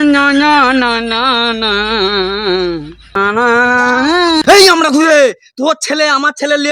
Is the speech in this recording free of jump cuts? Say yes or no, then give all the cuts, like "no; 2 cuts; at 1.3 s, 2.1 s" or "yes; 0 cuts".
yes; 0 cuts